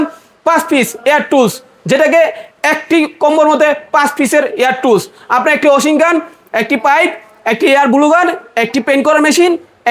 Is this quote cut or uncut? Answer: uncut